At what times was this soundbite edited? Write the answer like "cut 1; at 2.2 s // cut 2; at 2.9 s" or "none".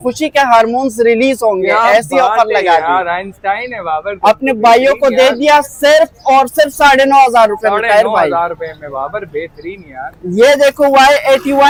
none